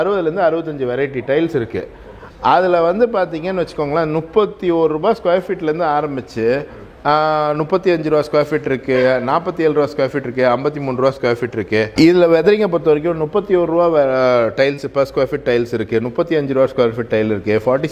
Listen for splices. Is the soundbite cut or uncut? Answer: uncut